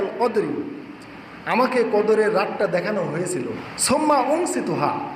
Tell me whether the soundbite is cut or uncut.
cut